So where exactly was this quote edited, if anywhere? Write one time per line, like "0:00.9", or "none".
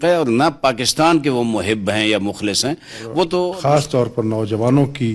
0:03.6